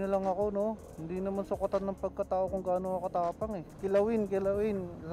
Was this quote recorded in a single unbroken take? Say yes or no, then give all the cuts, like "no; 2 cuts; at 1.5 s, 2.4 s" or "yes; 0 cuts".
no; 2 cuts; at 0.9 s, 3.7 s